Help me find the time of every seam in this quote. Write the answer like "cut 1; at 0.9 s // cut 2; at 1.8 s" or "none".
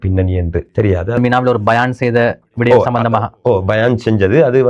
cut 1; at 1.2 s